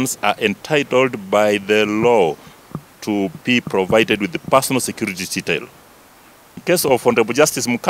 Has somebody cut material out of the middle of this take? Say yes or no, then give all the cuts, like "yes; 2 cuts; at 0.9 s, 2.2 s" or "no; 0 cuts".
yes; 1 cut; at 6.6 s